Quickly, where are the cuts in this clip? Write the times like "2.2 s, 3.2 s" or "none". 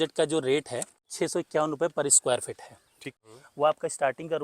1.1 s, 3.2 s